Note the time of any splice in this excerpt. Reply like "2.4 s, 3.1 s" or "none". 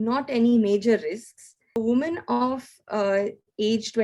1.8 s